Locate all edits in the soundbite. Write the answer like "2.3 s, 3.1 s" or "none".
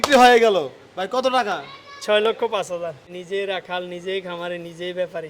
3.1 s

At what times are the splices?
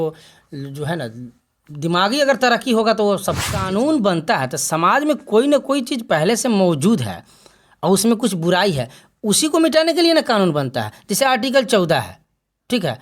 3.5 s

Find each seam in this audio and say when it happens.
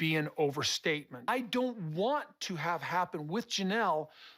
1.3 s

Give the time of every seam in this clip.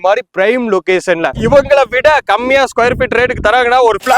1.4 s

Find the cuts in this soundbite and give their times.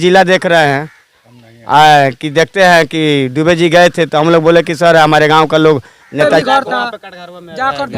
6.3 s

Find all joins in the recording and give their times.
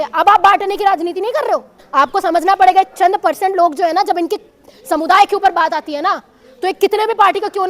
1.8 s

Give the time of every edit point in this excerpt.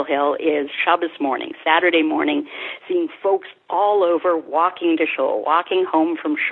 none

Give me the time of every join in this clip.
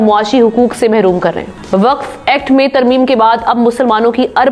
1.5 s

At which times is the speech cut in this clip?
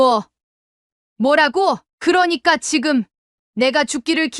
1.9 s

